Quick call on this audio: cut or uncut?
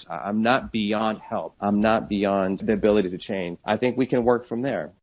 cut